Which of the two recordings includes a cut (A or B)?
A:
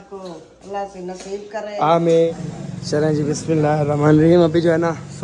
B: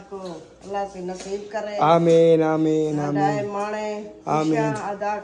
A